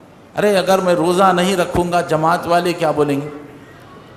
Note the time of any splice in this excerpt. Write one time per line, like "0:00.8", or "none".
none